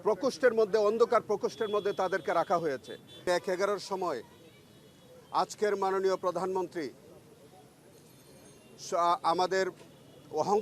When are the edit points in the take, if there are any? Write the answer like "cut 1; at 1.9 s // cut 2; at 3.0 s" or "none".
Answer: cut 1; at 3.3 s